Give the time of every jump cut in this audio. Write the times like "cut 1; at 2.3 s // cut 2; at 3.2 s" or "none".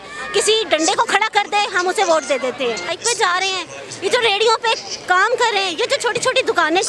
cut 1; at 3.0 s